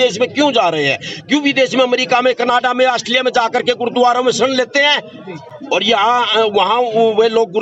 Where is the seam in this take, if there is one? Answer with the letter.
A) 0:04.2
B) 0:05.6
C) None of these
C